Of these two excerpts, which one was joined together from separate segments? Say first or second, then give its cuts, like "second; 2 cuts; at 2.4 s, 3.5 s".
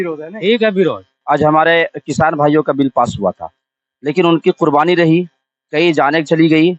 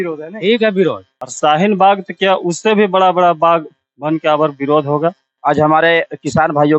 first; 1 cut; at 1.1 s